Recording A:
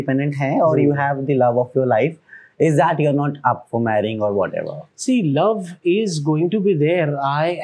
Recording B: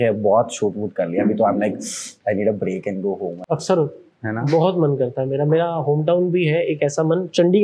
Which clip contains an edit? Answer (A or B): B